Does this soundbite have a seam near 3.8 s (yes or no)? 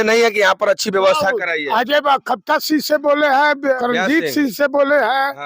yes